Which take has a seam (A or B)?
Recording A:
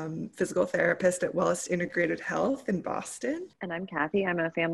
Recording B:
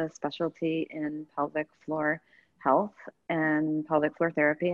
A